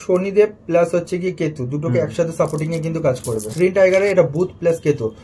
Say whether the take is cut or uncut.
cut